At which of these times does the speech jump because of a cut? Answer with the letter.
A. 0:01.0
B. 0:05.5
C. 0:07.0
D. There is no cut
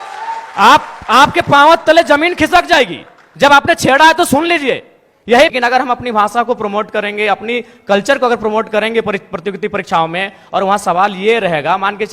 B